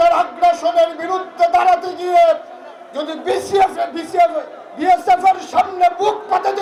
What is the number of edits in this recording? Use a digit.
0